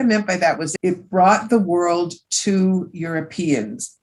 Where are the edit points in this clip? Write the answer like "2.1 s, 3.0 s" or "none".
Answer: none